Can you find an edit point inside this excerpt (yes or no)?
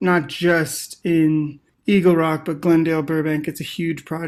no